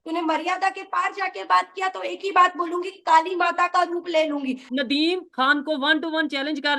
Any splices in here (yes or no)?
yes